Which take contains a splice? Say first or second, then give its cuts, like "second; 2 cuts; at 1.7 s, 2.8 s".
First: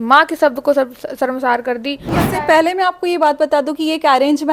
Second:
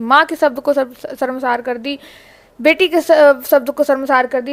first; 1 cut; at 2.2 s